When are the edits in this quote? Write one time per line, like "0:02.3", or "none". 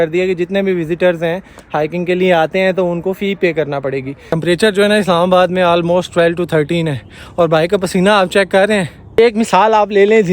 0:04.3
0:09.2